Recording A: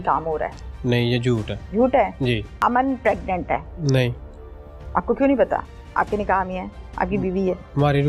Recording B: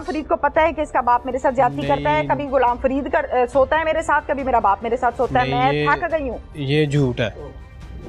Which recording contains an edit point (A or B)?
A